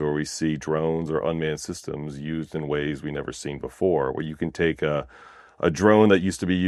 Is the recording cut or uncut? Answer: uncut